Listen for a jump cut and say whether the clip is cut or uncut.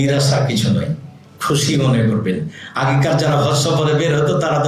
uncut